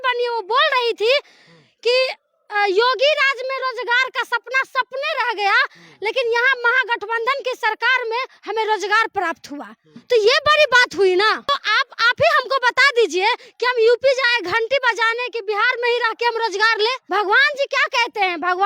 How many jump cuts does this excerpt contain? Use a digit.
2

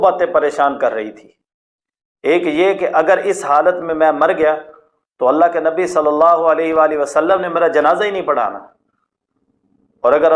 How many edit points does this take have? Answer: 0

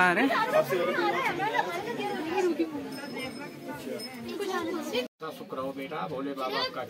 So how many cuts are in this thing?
1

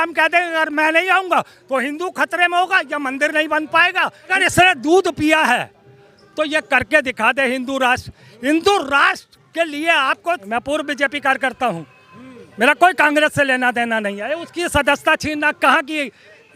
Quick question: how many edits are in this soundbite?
2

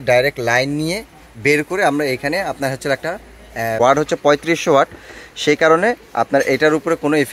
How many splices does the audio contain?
1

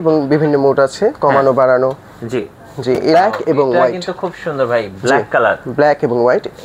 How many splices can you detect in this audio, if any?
1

